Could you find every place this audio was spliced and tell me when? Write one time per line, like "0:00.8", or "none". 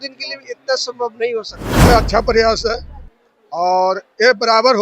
0:01.6